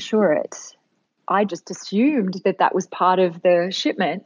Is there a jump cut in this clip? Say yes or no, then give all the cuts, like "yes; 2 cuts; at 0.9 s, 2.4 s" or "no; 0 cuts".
yes; 1 cut; at 1.4 s